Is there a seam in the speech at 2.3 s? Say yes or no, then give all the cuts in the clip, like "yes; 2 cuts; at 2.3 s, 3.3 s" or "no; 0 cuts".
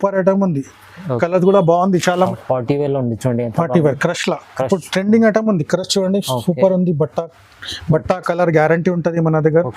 yes; 1 cut; at 2.3 s